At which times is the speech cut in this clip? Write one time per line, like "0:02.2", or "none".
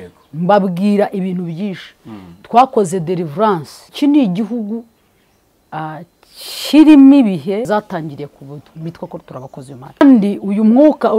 0:03.8
0:07.6
0:10.0